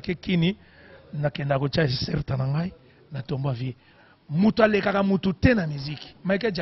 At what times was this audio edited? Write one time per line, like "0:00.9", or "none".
0:03.9

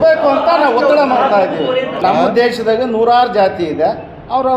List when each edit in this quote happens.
0:01.9

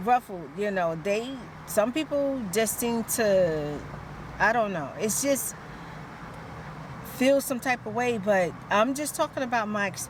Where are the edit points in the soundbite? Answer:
none

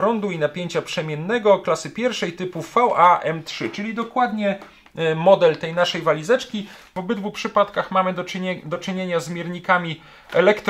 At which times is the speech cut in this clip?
0:07.0

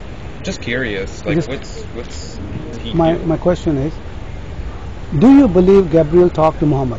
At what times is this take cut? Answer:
0:02.8

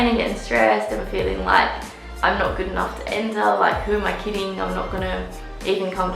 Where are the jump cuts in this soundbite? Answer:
none

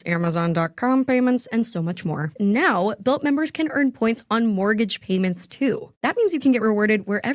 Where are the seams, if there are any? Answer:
0:02.3

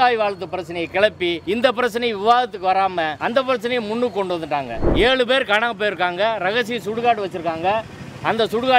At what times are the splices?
0:01.4
0:03.2
0:04.8

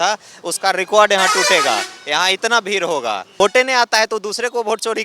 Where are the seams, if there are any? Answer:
0:03.4

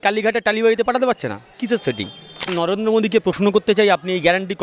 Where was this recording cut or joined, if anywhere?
0:02.5

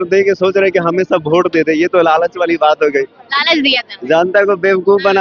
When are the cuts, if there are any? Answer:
none

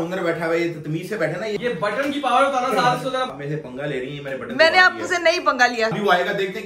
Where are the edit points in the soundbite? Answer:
0:01.6
0:03.3
0:05.9

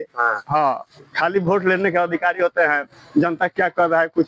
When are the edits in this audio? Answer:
0:00.9

